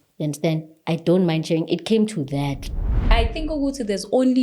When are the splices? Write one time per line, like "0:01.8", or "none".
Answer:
0:02.9